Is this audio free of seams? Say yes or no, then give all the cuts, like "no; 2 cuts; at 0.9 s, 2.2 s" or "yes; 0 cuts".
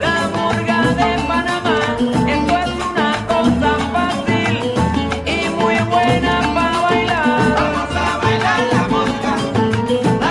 yes; 0 cuts